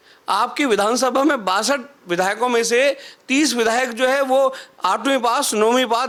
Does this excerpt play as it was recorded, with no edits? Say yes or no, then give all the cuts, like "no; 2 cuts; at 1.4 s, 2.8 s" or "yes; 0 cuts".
yes; 0 cuts